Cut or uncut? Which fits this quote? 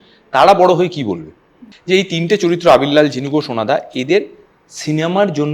uncut